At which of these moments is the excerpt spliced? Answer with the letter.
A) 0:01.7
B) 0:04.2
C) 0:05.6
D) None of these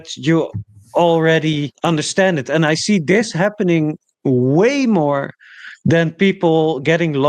A